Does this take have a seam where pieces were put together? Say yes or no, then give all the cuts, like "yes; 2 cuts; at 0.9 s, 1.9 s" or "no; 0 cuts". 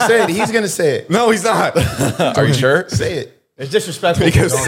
no; 0 cuts